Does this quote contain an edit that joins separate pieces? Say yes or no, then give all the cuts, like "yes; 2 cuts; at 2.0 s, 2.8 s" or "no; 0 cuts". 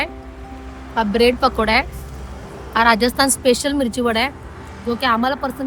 no; 0 cuts